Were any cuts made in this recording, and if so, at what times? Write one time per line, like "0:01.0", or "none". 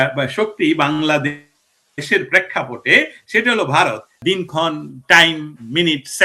0:04.1